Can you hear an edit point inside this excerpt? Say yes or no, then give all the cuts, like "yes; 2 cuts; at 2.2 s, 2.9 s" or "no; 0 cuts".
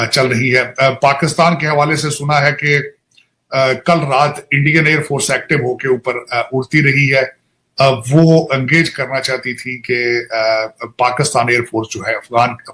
yes; 1 cut; at 5.3 s